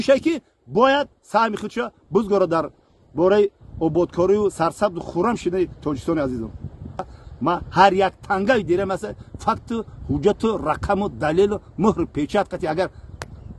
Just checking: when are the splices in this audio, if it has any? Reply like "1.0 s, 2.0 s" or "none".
7.2 s